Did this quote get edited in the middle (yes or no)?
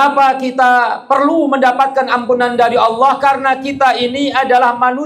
no